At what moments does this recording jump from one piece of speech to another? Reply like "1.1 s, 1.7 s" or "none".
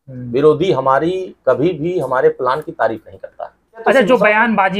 3.8 s

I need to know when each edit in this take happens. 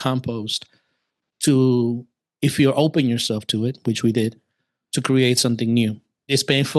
none

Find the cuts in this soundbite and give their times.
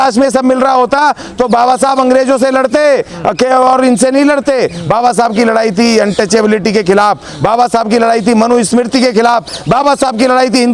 none

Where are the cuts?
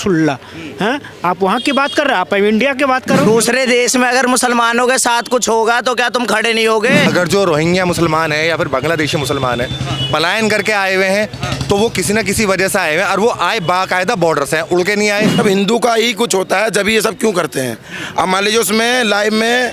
3.3 s, 7.1 s, 15.4 s

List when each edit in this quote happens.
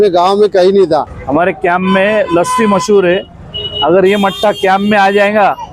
1.2 s

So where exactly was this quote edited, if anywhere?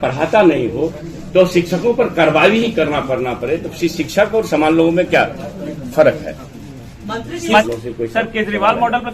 7.6 s

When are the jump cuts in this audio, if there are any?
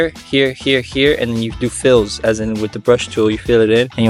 none

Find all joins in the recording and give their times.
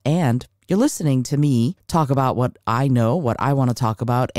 1.8 s

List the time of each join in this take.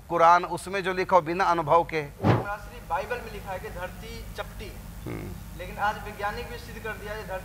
2.3 s

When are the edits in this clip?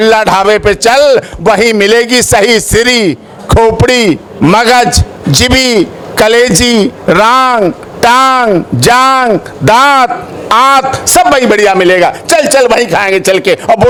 none

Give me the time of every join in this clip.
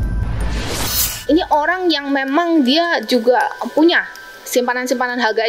1.1 s

